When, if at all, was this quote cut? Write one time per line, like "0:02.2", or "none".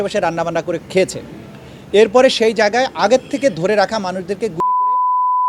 0:02.8